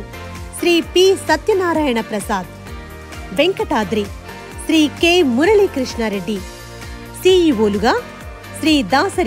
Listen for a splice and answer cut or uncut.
uncut